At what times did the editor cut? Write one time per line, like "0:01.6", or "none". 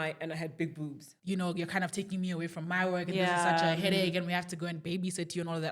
0:01.1